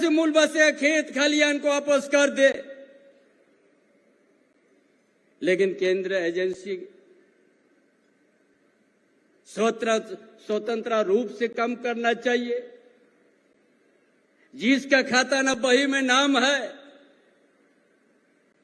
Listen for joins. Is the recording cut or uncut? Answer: uncut